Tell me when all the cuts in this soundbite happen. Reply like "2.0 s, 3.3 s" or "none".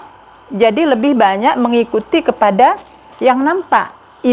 none

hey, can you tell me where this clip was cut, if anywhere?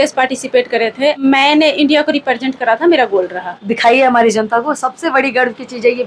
1.2 s, 3.7 s

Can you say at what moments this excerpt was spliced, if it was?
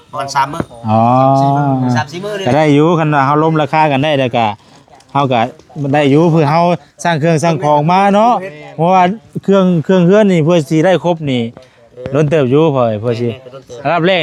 none

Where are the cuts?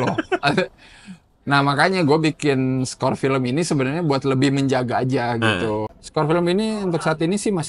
6.0 s

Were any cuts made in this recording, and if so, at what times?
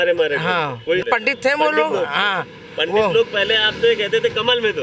1.0 s

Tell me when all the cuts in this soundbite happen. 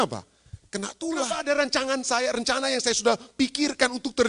1.2 s

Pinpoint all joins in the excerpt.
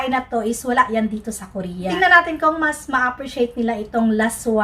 1.9 s

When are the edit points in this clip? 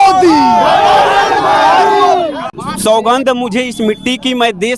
2.5 s

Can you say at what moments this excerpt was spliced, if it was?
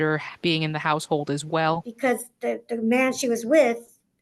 1.9 s

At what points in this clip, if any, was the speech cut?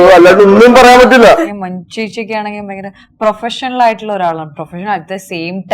1.6 s

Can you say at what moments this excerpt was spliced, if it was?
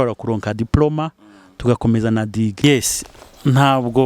2.6 s

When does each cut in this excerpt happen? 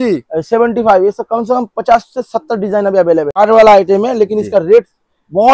3.4 s

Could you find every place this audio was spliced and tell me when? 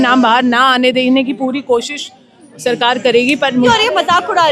3.5 s

